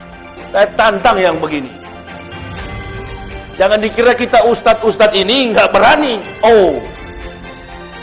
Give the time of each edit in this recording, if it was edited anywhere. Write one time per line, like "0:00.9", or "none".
none